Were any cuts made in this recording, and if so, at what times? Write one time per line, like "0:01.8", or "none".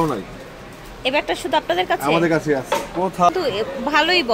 0:03.3